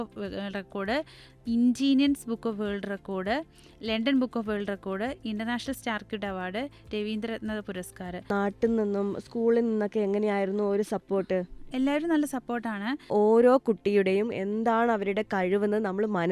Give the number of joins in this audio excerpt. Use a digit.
2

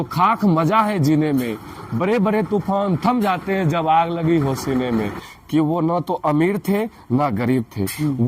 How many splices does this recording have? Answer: 1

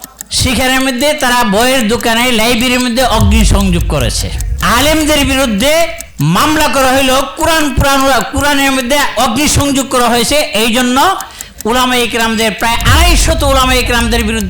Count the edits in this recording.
1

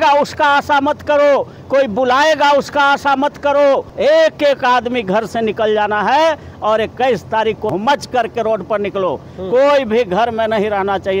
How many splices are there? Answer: 2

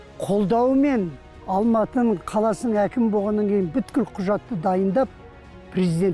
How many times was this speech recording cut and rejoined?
2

